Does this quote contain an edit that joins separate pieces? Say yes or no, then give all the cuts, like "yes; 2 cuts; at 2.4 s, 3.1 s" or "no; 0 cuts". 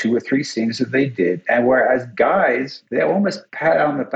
yes; 1 cut; at 3.2 s